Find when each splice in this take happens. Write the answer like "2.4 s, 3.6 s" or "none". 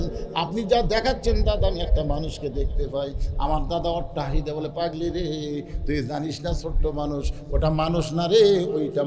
none